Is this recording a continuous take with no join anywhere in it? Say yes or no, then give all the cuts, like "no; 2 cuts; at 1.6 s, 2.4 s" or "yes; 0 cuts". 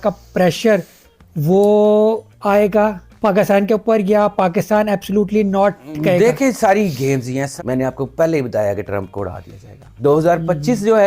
no; 2 cuts; at 7.5 s, 9.9 s